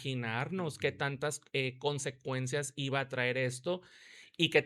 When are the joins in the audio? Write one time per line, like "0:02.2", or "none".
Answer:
none